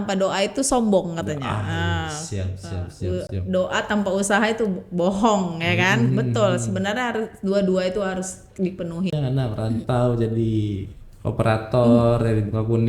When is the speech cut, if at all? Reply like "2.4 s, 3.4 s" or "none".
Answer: 9.1 s